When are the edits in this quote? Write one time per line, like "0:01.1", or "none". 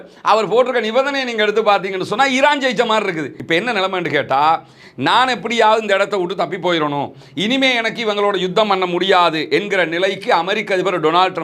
0:03.4